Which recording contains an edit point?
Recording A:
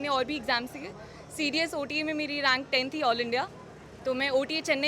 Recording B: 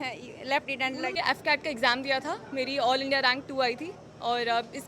B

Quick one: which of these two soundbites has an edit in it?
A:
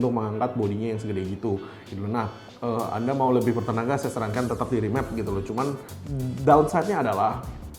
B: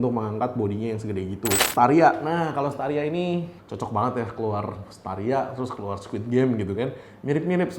B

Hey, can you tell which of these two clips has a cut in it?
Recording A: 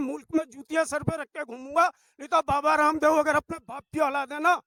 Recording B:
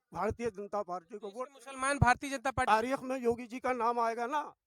B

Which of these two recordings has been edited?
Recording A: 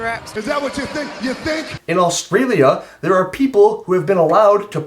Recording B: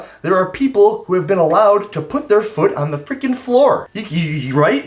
A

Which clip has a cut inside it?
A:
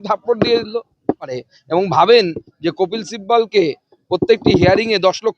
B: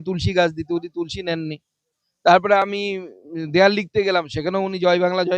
A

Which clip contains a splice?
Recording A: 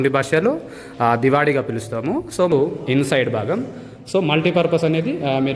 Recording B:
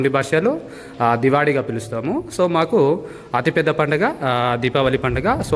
A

